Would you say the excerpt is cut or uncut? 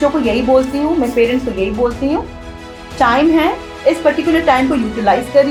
uncut